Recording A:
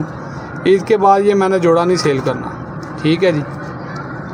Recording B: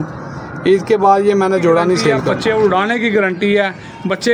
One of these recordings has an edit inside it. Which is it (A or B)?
B